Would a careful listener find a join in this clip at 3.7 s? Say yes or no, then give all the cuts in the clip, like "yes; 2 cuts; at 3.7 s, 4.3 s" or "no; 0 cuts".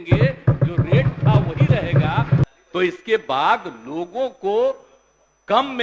no; 1 cut; at 2.5 s